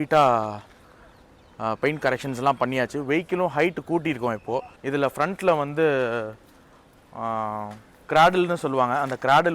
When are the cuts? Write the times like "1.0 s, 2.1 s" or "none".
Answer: 4.8 s